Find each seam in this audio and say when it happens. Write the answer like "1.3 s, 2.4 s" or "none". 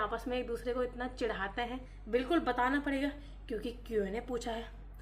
1.9 s